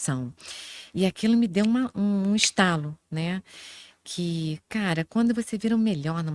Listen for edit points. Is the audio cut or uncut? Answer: uncut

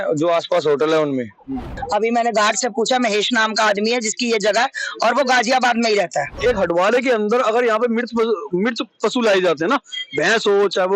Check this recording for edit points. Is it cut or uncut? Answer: cut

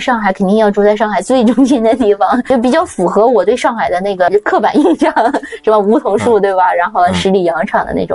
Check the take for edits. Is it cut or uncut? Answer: cut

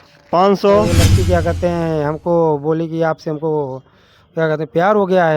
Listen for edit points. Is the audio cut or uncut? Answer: cut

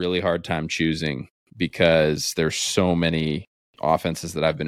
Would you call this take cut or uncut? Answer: uncut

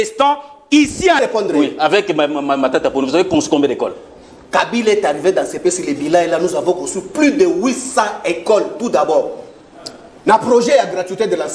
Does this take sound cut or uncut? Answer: cut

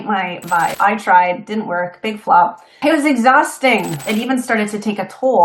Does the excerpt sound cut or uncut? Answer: cut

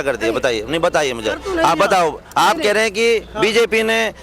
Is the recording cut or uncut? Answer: uncut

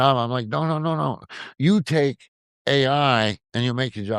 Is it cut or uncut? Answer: uncut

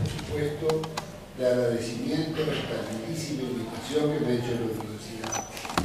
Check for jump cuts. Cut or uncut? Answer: uncut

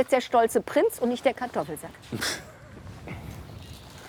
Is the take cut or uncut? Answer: uncut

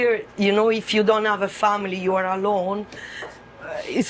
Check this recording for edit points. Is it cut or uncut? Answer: uncut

